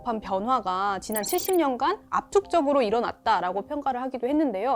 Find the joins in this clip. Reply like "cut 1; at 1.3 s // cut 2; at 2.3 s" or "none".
none